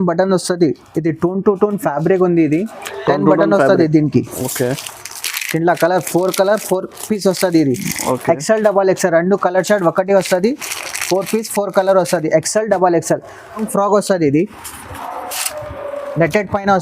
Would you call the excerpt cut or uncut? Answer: cut